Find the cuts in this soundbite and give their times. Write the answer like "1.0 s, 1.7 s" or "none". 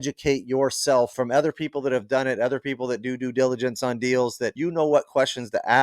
1.1 s, 4.5 s